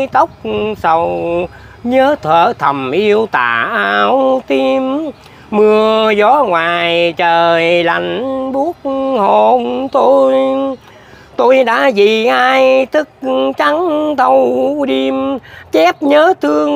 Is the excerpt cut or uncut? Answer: uncut